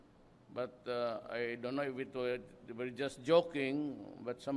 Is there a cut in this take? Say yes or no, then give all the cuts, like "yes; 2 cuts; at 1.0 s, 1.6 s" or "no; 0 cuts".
yes; 1 cut; at 2.1 s